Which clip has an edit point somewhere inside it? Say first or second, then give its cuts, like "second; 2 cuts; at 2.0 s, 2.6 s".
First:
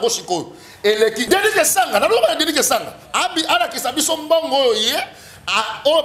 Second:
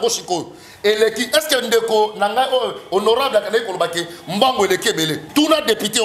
first; 1 cut; at 1.2 s